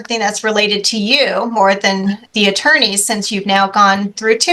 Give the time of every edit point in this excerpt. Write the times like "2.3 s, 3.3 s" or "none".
2.2 s